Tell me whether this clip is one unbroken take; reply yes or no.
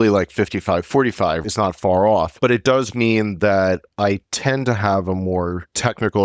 no